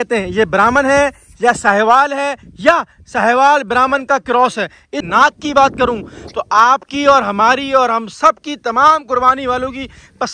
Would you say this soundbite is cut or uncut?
cut